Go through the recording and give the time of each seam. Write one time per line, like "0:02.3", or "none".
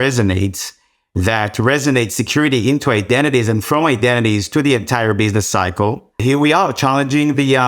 0:06.2